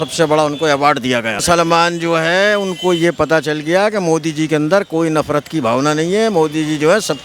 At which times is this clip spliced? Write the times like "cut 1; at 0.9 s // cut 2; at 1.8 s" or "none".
cut 1; at 1.4 s